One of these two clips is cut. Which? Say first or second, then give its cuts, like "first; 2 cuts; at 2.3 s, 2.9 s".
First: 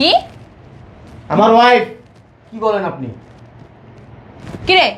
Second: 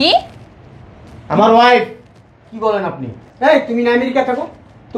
second; 1 cut; at 3.2 s